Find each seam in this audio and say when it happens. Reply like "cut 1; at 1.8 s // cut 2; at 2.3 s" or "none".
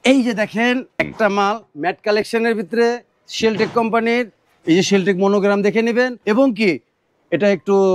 cut 1; at 0.9 s // cut 2; at 6.2 s